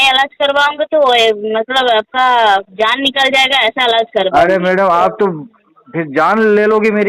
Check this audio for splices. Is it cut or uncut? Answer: uncut